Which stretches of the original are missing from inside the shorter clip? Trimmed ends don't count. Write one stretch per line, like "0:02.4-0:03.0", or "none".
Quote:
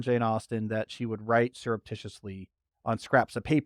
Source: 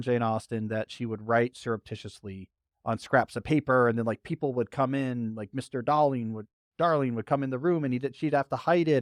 none